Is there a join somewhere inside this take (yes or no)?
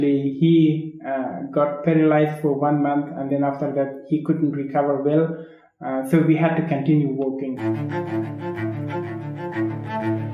yes